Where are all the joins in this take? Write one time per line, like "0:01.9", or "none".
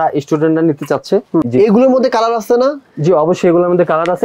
0:01.4